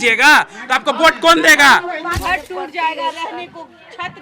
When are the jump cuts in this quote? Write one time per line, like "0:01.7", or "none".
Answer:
0:02.2